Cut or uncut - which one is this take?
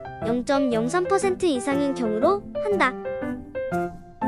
cut